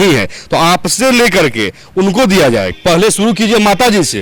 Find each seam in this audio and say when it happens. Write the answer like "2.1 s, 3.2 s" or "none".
2.8 s